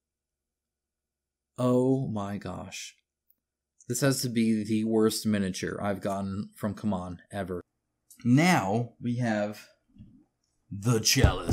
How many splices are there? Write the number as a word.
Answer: one